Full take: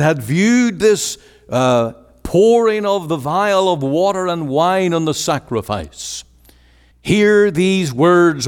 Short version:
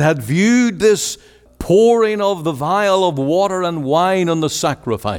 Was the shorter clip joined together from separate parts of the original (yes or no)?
yes